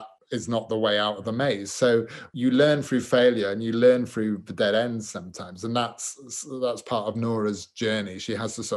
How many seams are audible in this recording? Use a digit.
1